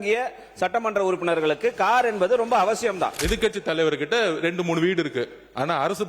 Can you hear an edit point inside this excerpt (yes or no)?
yes